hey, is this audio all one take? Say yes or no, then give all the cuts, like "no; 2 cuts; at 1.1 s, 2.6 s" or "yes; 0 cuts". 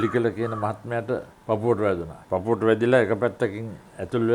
no; 2 cuts; at 1.3 s, 2.1 s